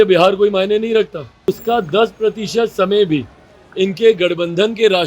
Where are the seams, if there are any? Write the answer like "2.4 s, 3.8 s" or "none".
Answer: 1.5 s